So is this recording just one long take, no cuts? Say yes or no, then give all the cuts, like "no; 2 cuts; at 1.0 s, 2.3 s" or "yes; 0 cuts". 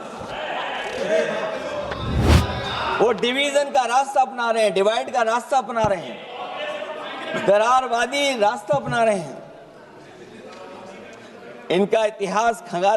no; 1 cut; at 2.2 s